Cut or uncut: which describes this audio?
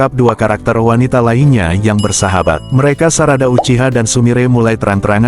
cut